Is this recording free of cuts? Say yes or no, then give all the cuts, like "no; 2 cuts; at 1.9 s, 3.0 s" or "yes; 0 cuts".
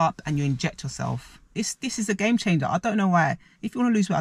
no; 1 cut; at 1.5 s